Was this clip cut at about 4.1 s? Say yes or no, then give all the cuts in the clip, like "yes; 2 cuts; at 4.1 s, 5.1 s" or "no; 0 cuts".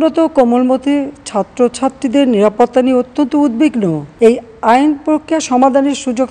yes; 1 cut; at 4.1 s